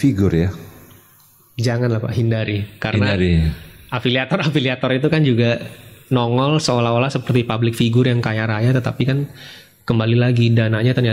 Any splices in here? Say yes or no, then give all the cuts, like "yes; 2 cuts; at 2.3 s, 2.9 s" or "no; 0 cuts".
no; 0 cuts